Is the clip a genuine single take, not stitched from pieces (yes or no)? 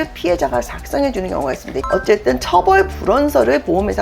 no